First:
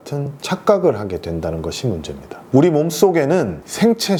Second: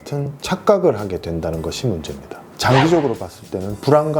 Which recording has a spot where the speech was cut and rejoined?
second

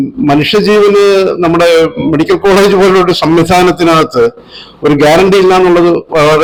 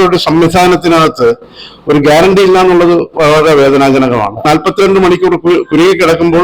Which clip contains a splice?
second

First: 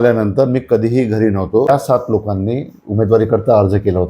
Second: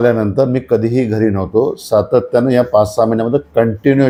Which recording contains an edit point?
first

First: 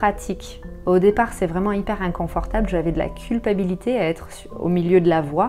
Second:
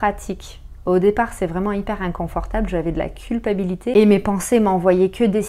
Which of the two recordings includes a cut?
second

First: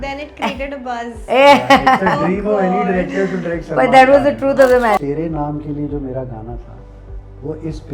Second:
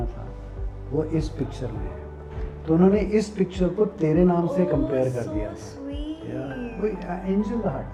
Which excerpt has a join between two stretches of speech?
first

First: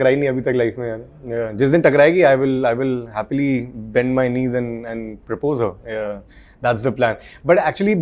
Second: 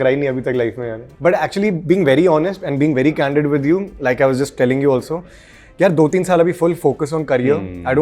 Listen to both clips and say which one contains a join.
second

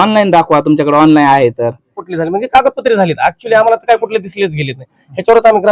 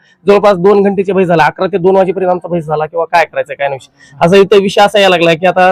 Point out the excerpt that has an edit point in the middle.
first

